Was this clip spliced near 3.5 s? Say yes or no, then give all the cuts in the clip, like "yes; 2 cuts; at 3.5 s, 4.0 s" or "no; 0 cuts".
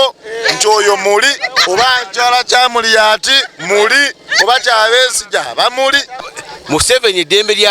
no; 2 cuts; at 1.5 s, 6.2 s